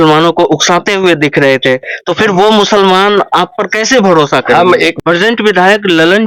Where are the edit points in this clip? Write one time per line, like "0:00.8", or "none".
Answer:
0:04.9